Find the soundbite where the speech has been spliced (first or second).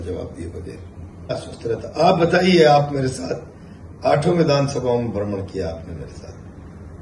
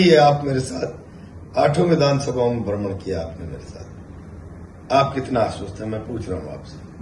first